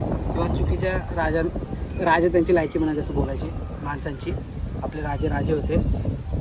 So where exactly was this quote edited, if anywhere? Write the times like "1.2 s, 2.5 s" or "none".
none